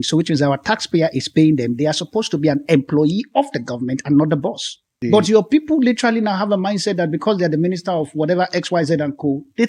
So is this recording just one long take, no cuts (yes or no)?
no